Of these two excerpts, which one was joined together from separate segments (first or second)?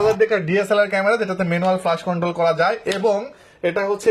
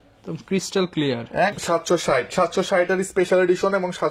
second